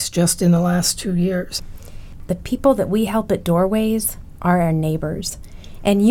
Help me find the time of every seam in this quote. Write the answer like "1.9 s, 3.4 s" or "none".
2.1 s